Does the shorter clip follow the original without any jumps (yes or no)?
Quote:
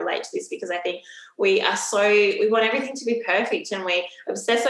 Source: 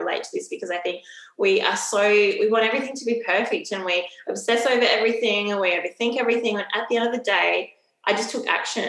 yes